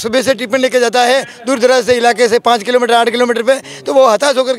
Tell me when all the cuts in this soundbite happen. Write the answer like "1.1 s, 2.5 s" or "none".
none